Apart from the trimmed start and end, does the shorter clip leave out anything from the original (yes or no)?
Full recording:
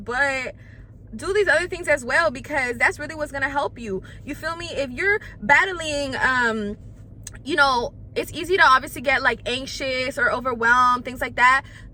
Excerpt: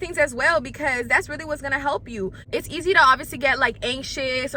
yes